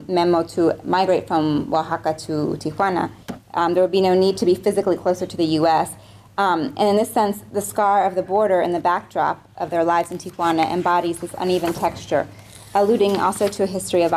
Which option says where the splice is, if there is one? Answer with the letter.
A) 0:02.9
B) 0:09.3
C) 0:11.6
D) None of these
A